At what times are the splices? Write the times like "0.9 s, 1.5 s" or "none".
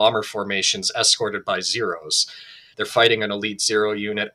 2.7 s